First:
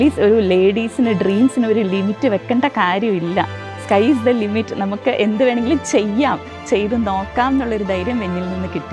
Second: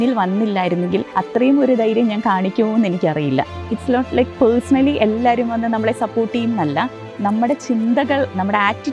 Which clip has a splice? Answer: second; 1 cut; at 1.1 s

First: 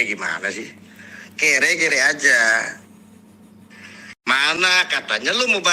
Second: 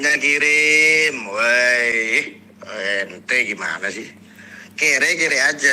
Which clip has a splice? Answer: first; 1 cut; at 4.3 s

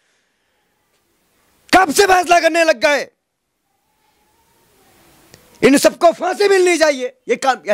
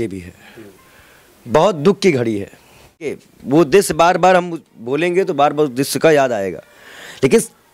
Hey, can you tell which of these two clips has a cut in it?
second; 1 cut; at 3.2 s

